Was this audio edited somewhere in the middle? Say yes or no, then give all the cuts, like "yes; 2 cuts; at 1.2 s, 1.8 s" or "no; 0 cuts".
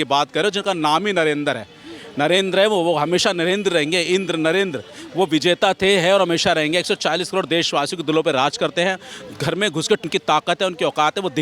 no; 0 cuts